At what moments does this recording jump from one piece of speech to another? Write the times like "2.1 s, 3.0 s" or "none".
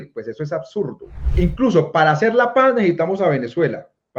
1.2 s